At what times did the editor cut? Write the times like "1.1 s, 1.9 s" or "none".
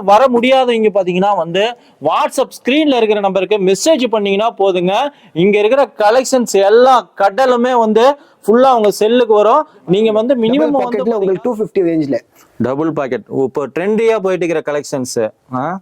10.9 s